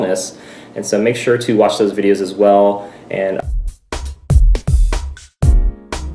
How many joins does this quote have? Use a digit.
1